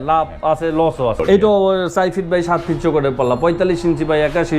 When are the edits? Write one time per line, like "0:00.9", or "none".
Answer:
0:01.2

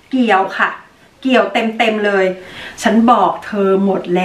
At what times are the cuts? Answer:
0:02.5

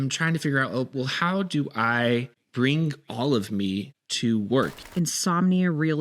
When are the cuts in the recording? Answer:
0:04.8

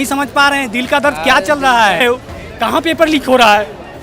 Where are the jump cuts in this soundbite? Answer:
0:02.0

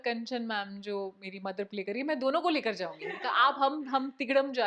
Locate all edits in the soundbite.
none

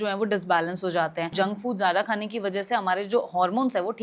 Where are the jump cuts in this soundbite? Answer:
0:01.3

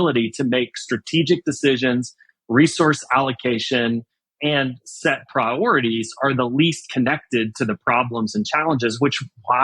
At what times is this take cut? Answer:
0:04.3

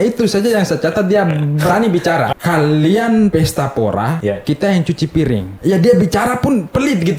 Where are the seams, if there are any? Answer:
0:02.3
0:03.3
0:04.2
0:05.5

